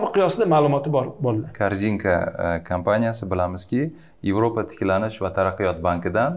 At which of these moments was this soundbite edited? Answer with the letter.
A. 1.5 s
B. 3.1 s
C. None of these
A